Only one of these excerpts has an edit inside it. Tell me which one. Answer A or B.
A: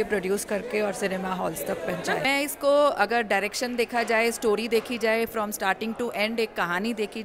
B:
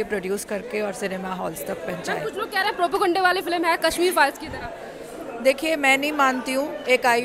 A